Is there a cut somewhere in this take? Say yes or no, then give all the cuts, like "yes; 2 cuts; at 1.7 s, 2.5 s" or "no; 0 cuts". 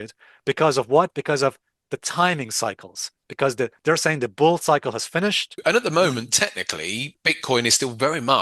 yes; 2 cuts; at 5.6 s, 7.1 s